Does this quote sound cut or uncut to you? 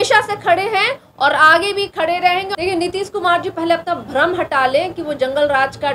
cut